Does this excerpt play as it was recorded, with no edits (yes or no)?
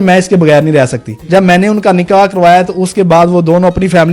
no